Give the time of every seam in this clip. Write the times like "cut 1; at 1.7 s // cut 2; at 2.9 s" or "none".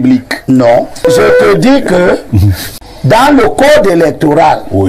cut 1; at 1.0 s